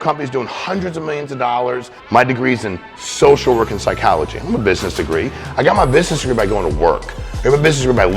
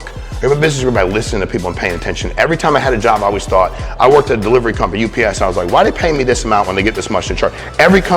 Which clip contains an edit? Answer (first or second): first